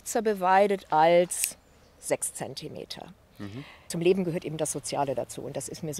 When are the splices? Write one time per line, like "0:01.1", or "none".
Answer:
0:03.9